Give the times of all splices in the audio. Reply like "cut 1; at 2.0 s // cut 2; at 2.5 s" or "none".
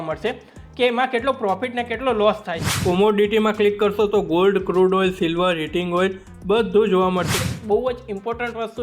cut 1; at 2.7 s // cut 2; at 7.4 s